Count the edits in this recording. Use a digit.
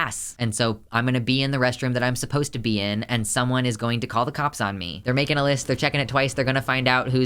1